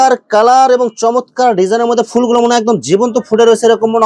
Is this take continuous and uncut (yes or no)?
yes